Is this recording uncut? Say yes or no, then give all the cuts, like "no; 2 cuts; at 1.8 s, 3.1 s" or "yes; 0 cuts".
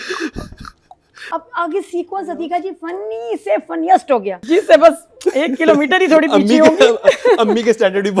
no; 2 cuts; at 1.2 s, 4.4 s